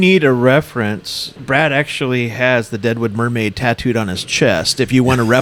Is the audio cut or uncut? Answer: uncut